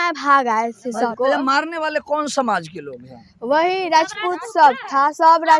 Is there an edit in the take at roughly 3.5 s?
no; 1 cut; at 1.1 s

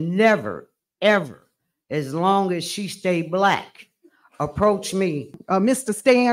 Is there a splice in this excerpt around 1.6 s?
no; 1 cut; at 5.4 s

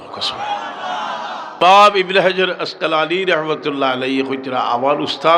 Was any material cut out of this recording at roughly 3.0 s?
no; 1 cut; at 1.6 s

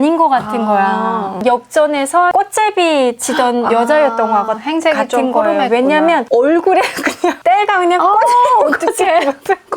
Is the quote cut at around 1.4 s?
yes; 2 cuts; at 1.4 s, 7.4 s

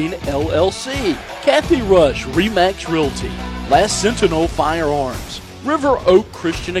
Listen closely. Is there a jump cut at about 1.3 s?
yes; 1 cut; at 1.3 s

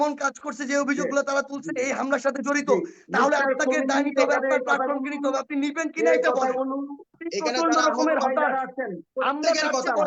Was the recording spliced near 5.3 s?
no; 1 cut; at 7.2 s

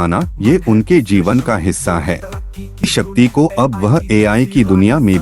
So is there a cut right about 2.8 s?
yes; 1 cut; at 2.8 s

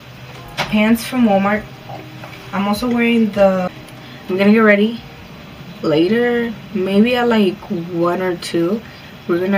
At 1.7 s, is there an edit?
no; 1 cut; at 3.8 s

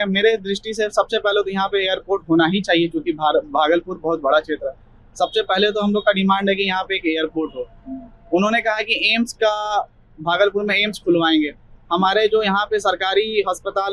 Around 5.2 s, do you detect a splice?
no; 0 cuts

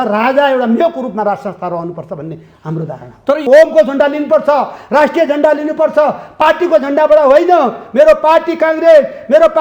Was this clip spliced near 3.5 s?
yes; 1 cut; at 3.5 s

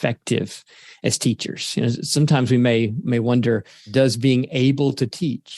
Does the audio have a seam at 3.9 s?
yes; 2 cuts; at 3.0 s, 3.9 s

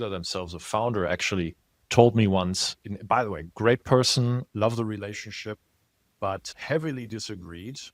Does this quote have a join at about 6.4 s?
yes; 1 cut; at 6.4 s

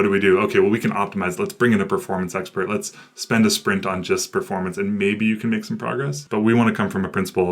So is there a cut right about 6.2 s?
yes; 1 cut; at 6.2 s

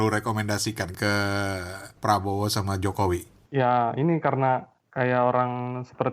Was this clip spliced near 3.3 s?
yes; 4 cuts; at 0.9 s, 1.9 s, 3.3 s, 4.8 s

